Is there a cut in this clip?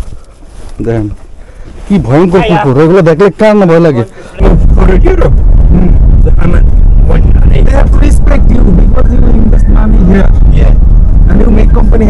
yes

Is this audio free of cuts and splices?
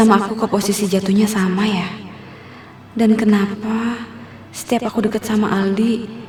yes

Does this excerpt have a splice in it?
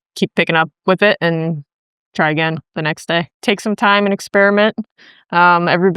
yes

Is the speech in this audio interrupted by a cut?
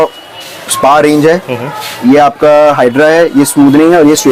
no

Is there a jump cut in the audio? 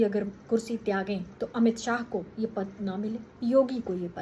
yes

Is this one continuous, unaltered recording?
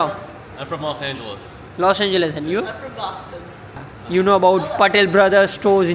no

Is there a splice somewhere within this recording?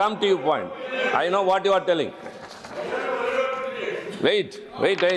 no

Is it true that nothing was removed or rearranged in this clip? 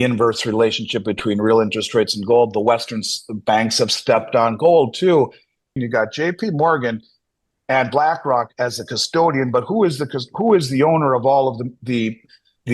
no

